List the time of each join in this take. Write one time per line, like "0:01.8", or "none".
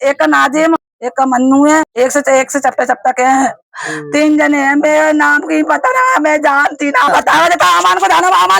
0:00.9
0:01.9
0:07.1